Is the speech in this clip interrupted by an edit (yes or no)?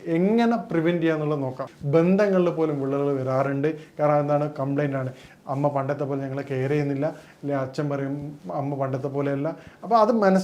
yes